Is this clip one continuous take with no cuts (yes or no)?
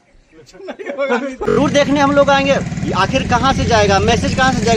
no